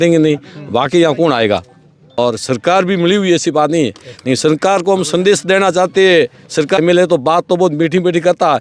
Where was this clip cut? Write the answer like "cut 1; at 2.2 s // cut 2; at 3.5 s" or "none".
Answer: cut 1; at 2.2 s // cut 2; at 6.8 s